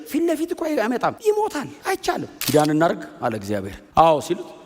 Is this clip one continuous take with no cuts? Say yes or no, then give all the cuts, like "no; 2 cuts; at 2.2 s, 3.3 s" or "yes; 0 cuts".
no; 3 cuts; at 1.2 s, 2.3 s, 3.8 s